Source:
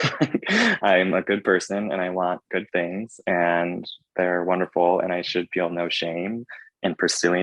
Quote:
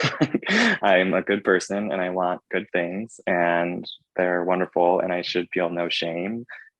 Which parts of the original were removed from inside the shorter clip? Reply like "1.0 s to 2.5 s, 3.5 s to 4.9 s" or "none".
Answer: none